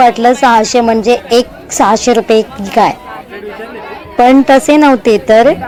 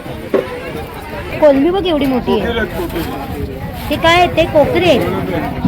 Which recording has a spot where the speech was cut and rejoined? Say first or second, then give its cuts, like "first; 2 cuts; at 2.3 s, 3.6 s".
second; 1 cut; at 1.3 s